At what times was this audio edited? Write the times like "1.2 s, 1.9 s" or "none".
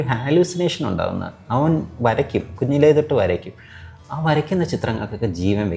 none